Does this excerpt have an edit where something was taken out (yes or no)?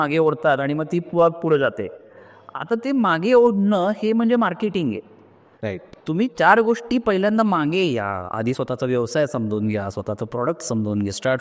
no